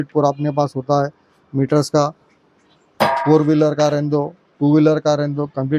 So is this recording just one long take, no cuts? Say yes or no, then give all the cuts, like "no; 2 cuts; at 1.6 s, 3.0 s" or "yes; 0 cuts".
yes; 0 cuts